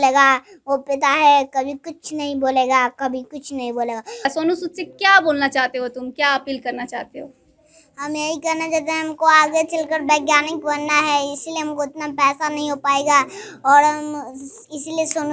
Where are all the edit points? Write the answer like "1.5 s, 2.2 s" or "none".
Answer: 4.3 s